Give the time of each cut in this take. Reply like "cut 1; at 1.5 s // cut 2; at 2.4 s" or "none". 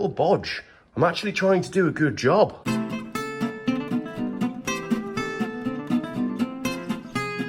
none